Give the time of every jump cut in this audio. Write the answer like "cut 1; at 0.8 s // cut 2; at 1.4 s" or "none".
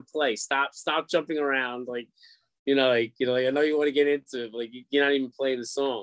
none